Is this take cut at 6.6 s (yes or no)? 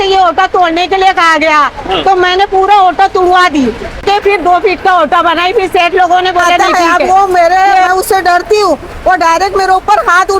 yes